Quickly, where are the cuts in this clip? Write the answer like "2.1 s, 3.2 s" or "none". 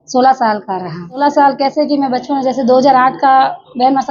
1.2 s